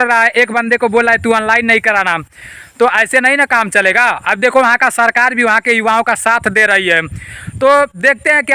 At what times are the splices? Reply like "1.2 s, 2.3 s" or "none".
none